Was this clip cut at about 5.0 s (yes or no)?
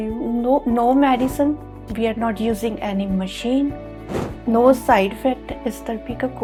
no